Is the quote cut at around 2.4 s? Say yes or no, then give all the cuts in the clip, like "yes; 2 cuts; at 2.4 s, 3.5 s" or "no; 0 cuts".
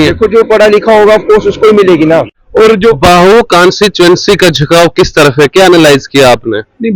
yes; 1 cut; at 2.4 s